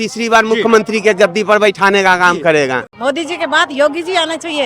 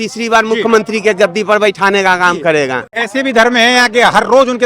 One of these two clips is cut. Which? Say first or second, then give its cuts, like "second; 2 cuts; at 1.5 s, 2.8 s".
first; 1 cut; at 2.9 s